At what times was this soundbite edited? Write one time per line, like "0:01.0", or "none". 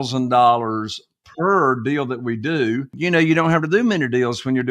0:02.9